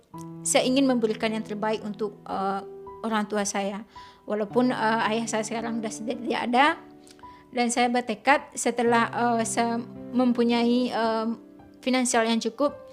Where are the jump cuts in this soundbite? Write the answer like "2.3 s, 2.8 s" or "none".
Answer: none